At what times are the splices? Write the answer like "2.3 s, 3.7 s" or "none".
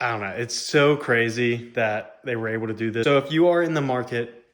3.0 s